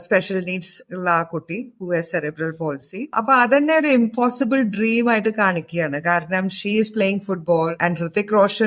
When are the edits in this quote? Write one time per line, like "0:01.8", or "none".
0:03.1
0:07.8